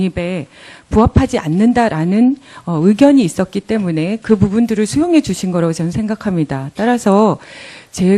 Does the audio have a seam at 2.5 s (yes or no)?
yes